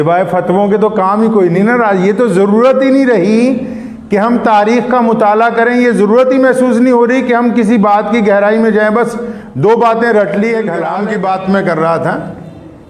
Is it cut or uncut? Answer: cut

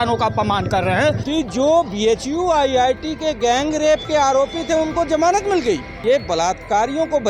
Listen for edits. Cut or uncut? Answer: cut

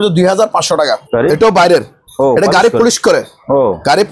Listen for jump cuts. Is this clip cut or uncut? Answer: cut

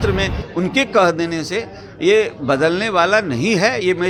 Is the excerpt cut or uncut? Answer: uncut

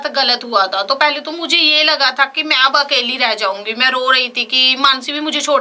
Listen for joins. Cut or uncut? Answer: uncut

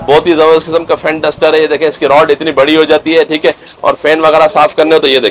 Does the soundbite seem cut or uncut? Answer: uncut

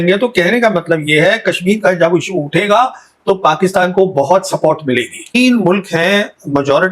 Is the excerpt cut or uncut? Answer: cut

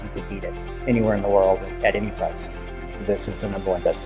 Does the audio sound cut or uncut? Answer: uncut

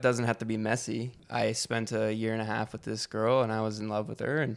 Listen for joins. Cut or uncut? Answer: cut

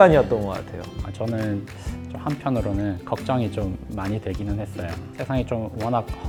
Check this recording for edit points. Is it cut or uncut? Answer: uncut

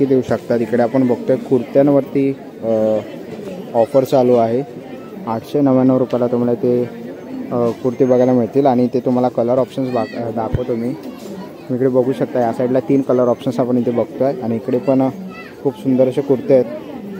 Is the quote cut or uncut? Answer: uncut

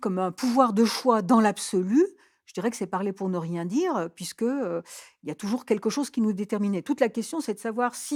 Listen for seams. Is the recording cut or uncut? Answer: uncut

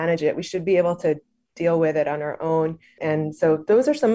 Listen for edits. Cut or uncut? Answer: cut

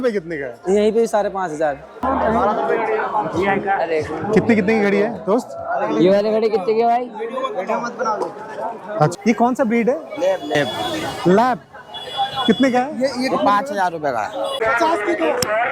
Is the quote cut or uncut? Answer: cut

